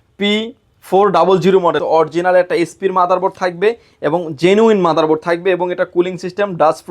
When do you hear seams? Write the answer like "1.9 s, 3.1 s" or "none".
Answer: 1.8 s